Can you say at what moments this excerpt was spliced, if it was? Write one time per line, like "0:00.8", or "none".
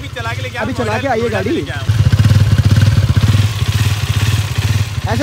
0:01.9